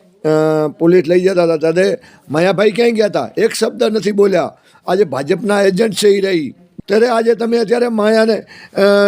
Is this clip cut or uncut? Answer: cut